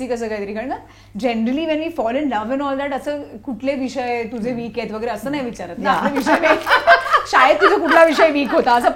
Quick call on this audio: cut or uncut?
uncut